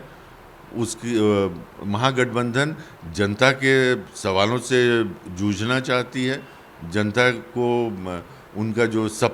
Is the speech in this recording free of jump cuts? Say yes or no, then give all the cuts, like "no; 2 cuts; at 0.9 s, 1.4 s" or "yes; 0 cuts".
yes; 0 cuts